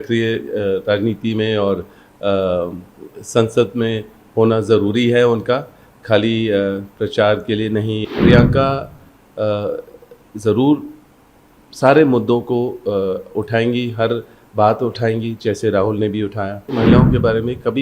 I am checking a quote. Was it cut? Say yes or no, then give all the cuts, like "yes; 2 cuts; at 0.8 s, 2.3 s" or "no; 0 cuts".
yes; 2 cuts; at 8.0 s, 16.7 s